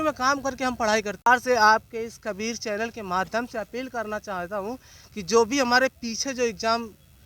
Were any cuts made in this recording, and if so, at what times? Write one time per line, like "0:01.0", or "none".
0:01.3

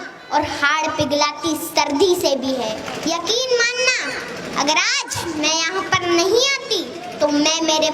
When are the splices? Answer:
0:02.9

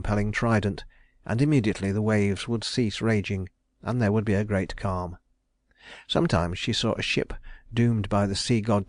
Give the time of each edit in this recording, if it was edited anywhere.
none

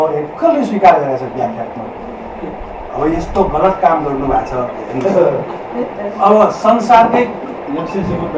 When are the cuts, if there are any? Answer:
none

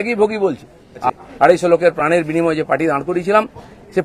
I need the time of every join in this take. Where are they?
0:01.1

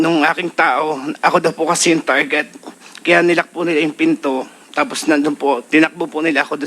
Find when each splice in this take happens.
none

